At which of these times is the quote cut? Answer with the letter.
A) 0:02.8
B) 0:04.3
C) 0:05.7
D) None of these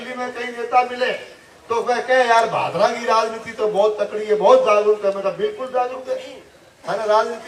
D